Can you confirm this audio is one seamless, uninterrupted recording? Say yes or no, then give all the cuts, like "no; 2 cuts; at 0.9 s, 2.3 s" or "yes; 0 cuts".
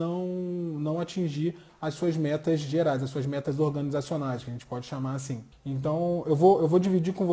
no; 1 cut; at 5.5 s